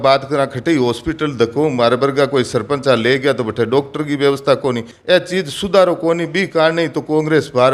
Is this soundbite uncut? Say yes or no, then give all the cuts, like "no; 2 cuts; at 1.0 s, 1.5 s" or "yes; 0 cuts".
no; 1 cut; at 4.9 s